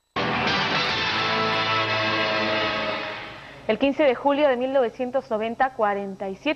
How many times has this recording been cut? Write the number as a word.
one